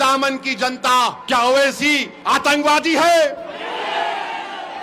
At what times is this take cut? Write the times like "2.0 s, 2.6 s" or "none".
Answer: 1.2 s, 2.1 s